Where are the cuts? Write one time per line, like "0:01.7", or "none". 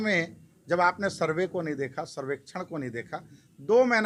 none